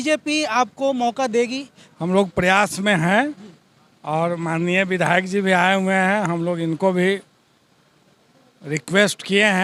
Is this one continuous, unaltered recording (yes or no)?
yes